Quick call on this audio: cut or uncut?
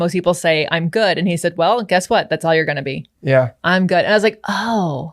uncut